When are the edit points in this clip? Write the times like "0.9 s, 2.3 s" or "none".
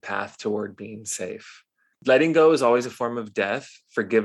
2.0 s